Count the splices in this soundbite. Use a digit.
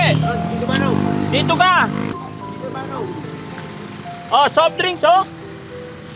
1